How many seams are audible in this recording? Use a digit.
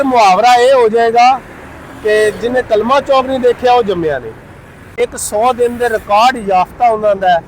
1